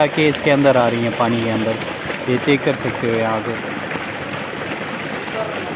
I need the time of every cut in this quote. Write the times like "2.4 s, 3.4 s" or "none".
none